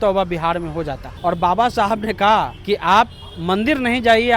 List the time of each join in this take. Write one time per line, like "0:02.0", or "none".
0:01.0
0:02.6